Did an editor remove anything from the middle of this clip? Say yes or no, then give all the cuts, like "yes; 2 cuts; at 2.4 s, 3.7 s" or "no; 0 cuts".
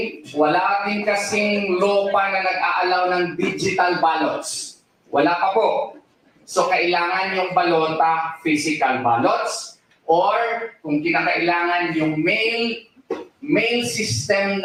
no; 0 cuts